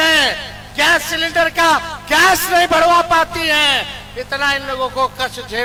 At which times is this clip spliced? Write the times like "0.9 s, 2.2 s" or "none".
none